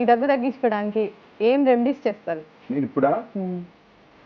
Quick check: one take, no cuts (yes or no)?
no